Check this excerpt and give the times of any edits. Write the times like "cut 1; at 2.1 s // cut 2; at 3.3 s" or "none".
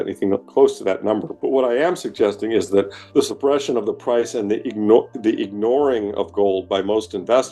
cut 1; at 1.3 s // cut 2; at 3.0 s